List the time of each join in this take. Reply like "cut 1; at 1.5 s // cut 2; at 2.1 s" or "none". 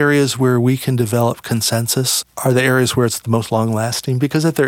none